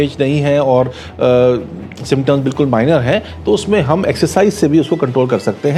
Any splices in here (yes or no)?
no